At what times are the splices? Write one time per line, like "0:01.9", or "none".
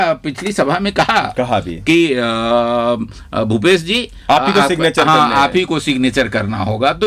none